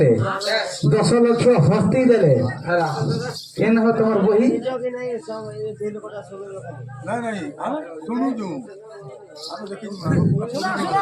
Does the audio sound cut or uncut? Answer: uncut